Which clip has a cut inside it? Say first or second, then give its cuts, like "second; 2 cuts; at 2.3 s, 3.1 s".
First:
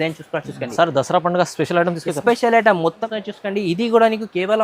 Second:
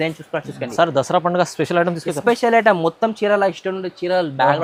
first; 1 cut; at 3.1 s